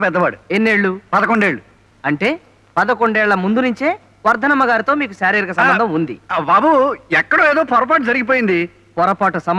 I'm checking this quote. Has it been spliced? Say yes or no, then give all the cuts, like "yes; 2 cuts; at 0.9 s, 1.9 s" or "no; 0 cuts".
no; 0 cuts